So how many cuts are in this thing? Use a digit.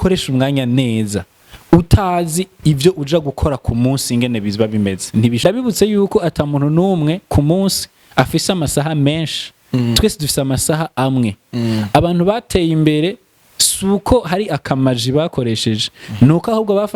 1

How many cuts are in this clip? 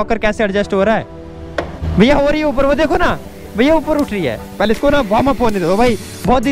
2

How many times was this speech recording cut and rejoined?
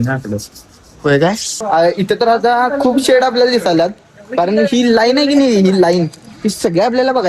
1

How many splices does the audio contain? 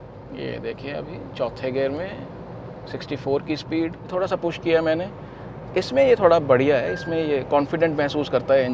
1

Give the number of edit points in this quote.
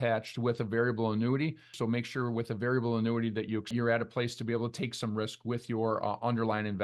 2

